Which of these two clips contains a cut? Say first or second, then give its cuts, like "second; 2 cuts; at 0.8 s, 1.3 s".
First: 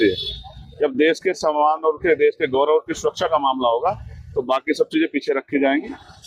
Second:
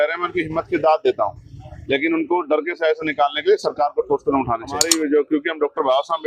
second; 1 cut; at 4.8 s